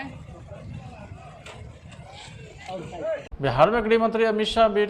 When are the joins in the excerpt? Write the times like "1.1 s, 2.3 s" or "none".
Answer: 3.4 s